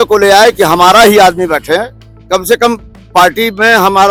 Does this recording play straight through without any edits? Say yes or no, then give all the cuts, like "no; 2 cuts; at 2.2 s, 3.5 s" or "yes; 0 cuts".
yes; 0 cuts